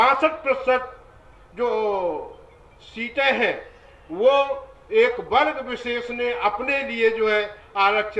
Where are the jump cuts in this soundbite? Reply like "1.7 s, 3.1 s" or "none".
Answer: none